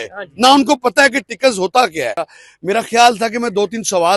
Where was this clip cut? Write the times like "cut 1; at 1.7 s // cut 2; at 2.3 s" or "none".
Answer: cut 1; at 2.2 s